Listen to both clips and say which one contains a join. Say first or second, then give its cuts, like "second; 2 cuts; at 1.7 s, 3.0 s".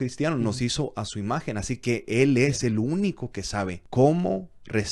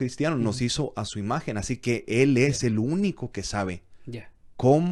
first; 1 cut; at 3.8 s